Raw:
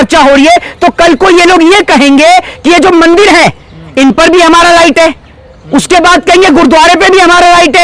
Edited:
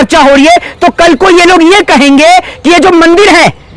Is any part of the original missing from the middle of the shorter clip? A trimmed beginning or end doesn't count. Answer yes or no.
no